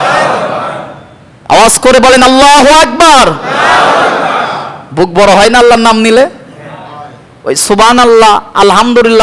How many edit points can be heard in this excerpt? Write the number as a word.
zero